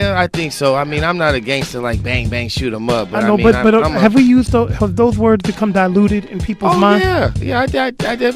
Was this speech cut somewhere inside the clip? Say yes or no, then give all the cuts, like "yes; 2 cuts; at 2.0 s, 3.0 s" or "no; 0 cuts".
no; 0 cuts